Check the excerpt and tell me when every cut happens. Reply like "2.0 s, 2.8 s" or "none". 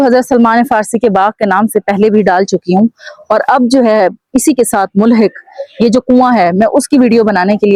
none